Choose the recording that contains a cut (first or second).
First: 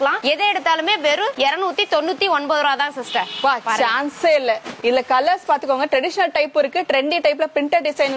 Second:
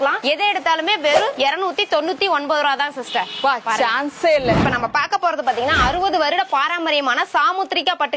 second